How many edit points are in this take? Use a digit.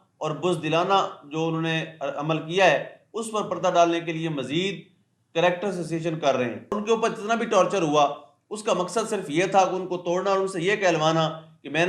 1